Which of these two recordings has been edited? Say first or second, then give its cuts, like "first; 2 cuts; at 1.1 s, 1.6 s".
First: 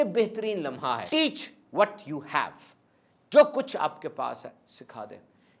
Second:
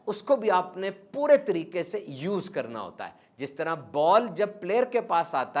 first; 1 cut; at 1.0 s